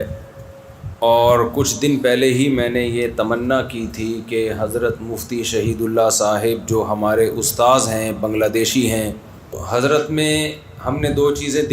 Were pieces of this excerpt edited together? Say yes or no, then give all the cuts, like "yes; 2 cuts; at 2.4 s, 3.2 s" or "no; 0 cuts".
yes; 1 cut; at 9.6 s